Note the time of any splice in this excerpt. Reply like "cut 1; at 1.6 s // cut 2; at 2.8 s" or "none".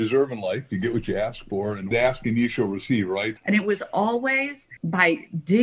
cut 1; at 1.9 s // cut 2; at 3.3 s // cut 3; at 4.7 s